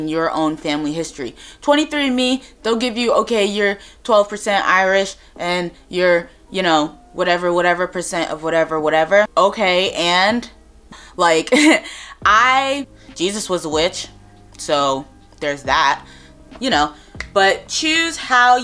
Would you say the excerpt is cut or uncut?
cut